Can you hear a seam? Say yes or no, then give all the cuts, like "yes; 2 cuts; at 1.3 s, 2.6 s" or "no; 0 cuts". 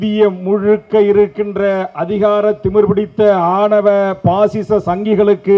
no; 0 cuts